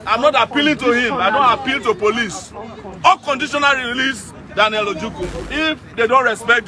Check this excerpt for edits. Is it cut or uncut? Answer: cut